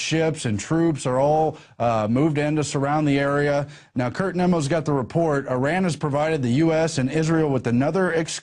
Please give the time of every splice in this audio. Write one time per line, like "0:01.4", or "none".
0:04.5

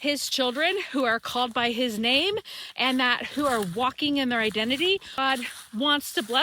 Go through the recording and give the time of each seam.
0:05.2

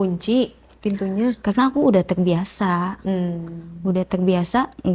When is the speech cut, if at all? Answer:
none

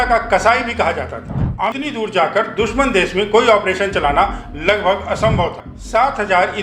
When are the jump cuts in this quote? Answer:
0:01.6
0:05.7

